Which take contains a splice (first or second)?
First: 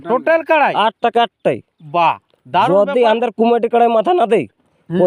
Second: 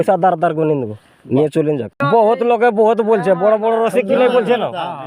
second